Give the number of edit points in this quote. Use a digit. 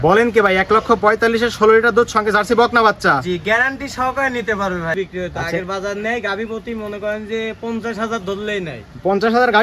1